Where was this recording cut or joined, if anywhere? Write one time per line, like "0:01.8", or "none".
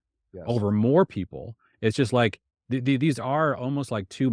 none